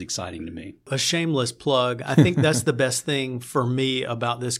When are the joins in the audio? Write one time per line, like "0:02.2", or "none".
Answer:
0:01.0